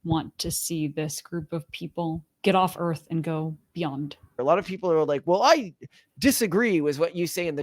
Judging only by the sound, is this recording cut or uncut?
cut